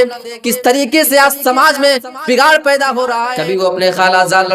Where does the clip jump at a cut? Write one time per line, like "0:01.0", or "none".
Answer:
0:03.2